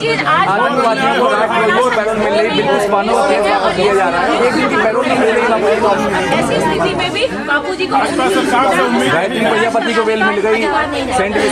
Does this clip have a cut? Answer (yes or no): no